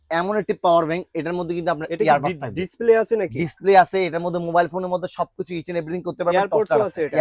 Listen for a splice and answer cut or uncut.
uncut